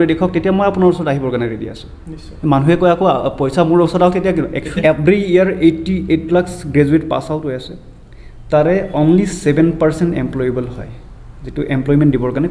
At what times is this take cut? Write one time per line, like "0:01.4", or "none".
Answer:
0:04.7